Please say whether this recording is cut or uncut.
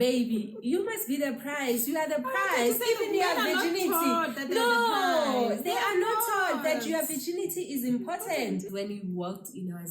cut